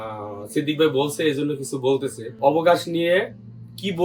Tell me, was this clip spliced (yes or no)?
yes